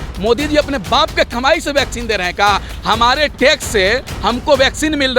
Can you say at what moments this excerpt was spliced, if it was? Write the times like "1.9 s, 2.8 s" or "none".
none